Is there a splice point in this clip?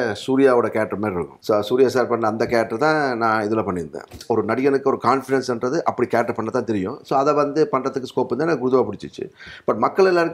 yes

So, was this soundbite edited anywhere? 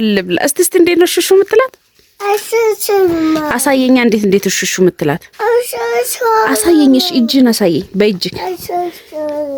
no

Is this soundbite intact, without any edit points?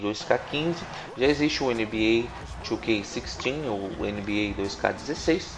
no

